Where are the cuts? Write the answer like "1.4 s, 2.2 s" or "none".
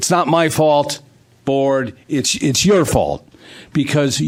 none